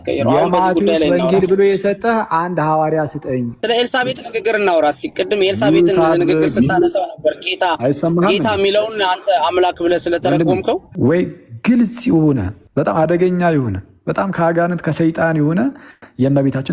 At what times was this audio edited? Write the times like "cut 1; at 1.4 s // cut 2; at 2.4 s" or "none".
cut 1; at 3.6 s // cut 2; at 10.9 s // cut 3; at 12.6 s